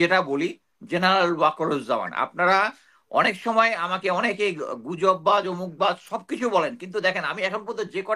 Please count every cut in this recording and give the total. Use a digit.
0